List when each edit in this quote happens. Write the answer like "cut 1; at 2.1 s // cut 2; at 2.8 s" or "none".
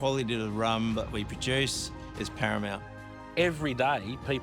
cut 1; at 3.3 s